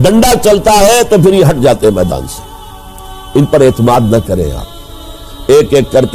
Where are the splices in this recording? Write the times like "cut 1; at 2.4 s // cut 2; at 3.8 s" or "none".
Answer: cut 1; at 5.2 s